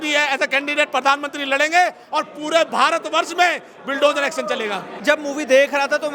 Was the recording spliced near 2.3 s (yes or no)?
no